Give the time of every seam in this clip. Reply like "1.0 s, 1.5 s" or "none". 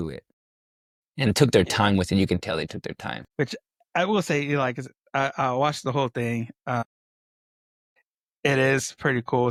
none

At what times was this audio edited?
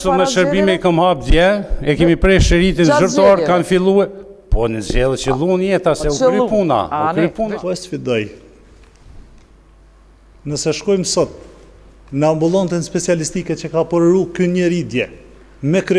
7.5 s

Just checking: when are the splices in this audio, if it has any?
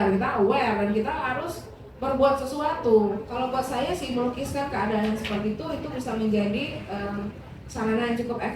3.3 s

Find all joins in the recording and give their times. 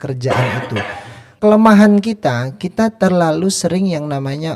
1.3 s

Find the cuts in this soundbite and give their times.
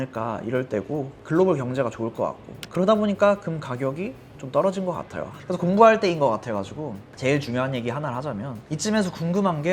1.1 s, 5.4 s

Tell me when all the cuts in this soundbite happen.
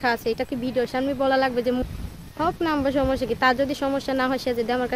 1.8 s

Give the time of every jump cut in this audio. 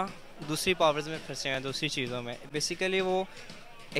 none

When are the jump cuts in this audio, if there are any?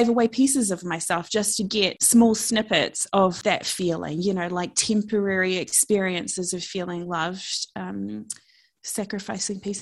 2.0 s, 3.4 s

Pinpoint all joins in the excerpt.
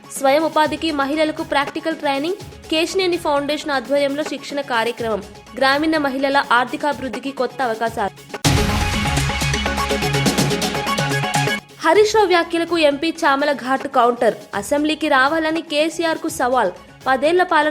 8.2 s

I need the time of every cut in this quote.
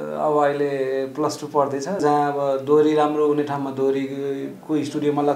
2.0 s

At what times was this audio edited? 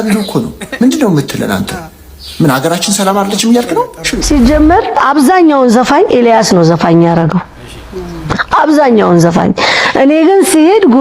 4.1 s

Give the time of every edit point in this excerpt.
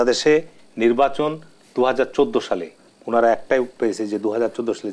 none

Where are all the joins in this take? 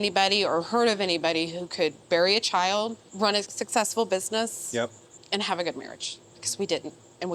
3.1 s, 5.1 s

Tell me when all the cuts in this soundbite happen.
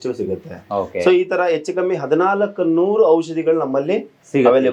none

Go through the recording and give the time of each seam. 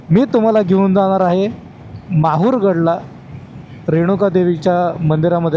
none

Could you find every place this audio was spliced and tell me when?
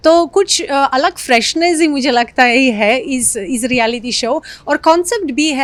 none

